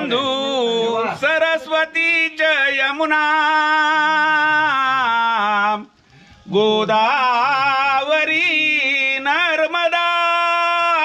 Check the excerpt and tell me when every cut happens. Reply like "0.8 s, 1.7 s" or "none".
none